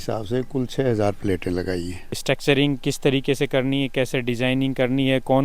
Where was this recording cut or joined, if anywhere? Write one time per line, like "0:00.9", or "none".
0:02.1